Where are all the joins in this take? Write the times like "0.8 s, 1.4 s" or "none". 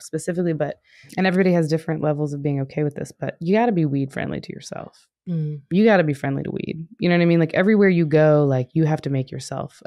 1.1 s